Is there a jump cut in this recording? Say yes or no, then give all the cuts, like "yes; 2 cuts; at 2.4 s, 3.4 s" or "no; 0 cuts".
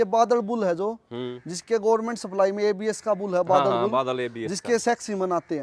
no; 0 cuts